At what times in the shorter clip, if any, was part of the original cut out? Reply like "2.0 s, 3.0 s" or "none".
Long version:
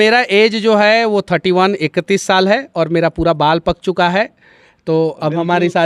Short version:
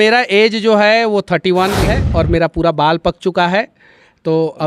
1.9 s